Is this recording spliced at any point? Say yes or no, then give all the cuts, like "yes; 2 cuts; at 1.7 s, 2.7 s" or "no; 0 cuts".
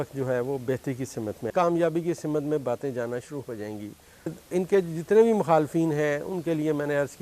yes; 2 cuts; at 1.5 s, 4.3 s